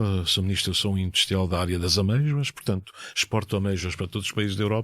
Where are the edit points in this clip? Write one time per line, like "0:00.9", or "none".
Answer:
0:01.2